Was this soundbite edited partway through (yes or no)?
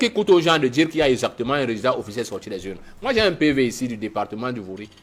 no